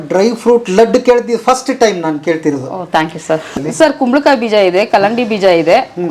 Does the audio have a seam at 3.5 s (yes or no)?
yes